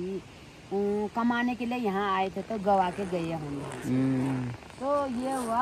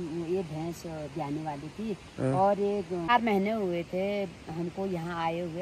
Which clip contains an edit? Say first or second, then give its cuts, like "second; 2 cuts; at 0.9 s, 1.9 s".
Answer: second; 1 cut; at 3.1 s